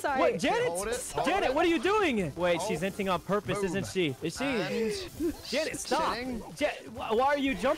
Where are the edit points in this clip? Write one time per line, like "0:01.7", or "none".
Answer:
none